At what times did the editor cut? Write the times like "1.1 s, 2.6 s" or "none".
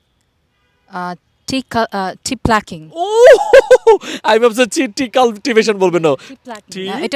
none